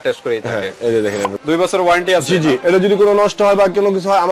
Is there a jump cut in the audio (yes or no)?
yes